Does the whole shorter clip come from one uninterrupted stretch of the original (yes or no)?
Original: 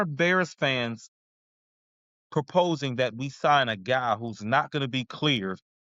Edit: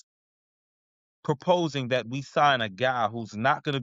yes